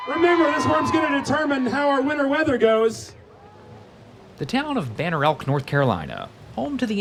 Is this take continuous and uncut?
yes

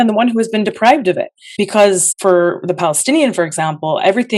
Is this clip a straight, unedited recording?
yes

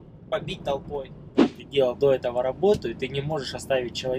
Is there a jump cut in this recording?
yes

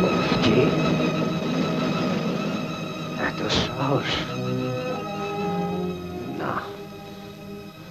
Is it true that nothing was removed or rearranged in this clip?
yes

